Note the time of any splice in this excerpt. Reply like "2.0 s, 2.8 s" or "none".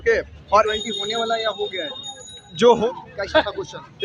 2.9 s